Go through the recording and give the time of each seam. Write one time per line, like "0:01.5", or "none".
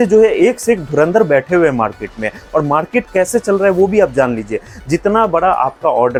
none